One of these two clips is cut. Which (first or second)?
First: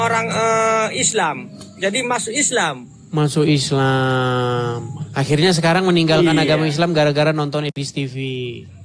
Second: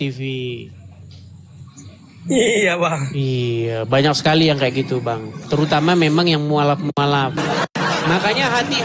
second